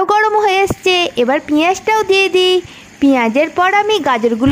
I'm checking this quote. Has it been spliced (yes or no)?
no